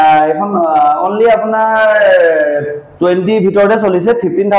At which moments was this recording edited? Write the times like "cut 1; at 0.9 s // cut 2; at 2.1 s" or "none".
none

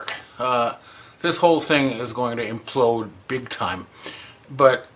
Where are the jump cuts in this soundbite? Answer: cut 1; at 2.9 s

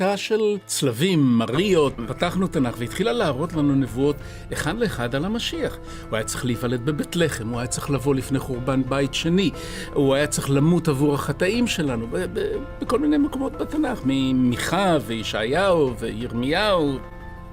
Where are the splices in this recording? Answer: cut 1; at 2.0 s

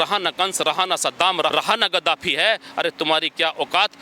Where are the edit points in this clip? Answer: cut 1; at 1.5 s

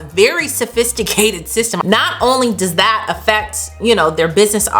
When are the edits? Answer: cut 1; at 1.8 s

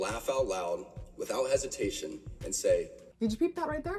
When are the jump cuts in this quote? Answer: cut 1; at 3.1 s

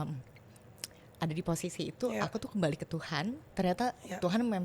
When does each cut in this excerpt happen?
cut 1; at 3.5 s

